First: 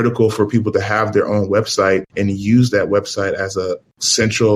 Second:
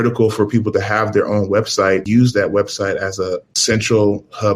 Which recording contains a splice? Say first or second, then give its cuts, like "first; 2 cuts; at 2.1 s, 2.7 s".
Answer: second; 2 cuts; at 2.0 s, 3.5 s